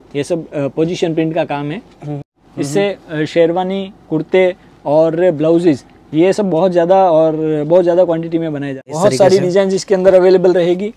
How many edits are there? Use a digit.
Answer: 2